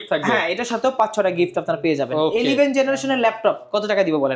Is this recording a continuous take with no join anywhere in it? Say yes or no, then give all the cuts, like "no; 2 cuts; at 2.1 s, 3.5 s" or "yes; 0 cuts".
yes; 0 cuts